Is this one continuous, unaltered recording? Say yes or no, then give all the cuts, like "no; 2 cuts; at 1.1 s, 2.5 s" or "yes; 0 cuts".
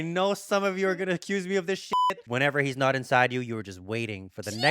no; 1 cut; at 2.0 s